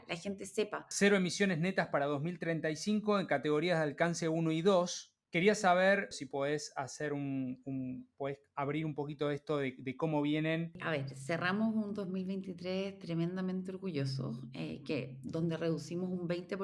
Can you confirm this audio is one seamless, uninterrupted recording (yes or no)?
no